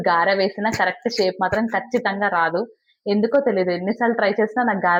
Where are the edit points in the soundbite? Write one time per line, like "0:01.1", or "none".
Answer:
none